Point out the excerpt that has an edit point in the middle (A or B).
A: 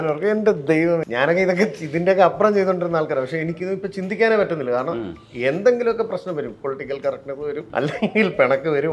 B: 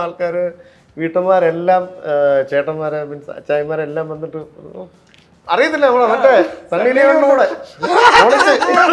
A